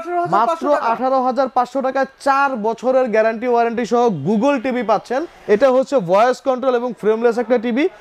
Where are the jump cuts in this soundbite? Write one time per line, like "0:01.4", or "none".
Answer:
0:05.3